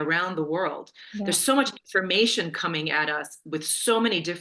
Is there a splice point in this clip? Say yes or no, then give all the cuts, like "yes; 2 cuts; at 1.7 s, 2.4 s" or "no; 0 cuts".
no; 0 cuts